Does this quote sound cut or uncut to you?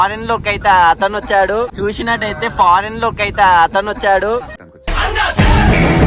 uncut